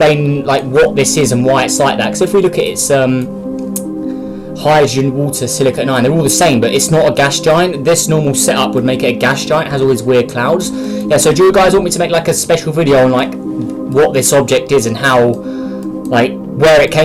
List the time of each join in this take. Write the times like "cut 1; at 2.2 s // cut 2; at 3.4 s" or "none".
none